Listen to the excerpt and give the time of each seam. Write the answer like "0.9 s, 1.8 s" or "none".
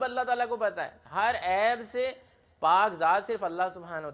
0.9 s